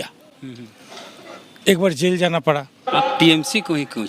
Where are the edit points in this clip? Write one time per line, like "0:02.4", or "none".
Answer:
0:02.8